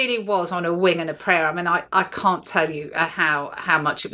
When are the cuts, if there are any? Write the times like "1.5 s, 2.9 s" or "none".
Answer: none